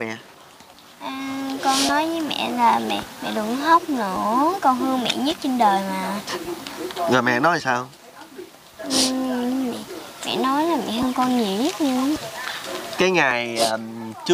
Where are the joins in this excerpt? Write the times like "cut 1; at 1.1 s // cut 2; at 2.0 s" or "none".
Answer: none